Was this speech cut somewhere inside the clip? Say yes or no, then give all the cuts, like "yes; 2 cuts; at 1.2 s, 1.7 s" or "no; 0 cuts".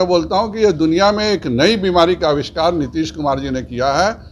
no; 0 cuts